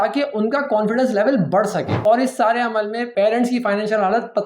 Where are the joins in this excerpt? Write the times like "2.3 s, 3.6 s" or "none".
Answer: 1.9 s, 3.1 s